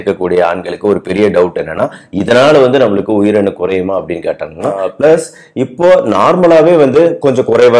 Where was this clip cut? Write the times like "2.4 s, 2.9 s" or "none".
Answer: 4.9 s